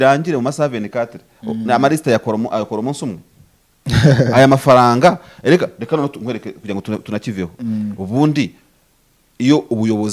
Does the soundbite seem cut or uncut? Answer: uncut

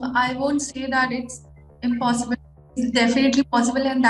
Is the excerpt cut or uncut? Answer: uncut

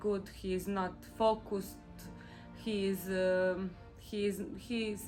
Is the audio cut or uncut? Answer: uncut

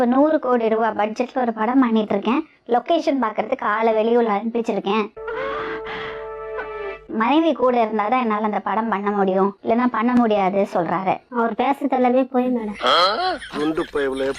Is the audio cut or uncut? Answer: cut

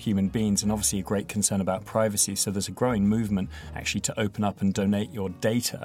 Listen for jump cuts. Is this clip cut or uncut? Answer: uncut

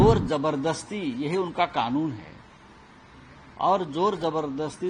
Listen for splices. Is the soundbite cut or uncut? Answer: uncut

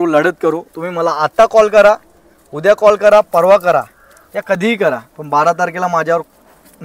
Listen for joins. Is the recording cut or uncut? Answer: uncut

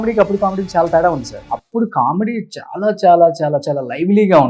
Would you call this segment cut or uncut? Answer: cut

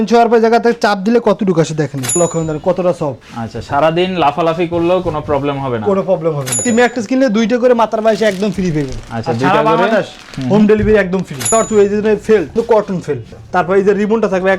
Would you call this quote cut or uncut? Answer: cut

